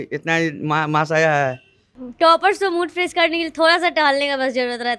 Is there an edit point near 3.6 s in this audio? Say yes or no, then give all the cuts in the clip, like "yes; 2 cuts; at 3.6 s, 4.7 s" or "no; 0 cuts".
no; 1 cut; at 2.0 s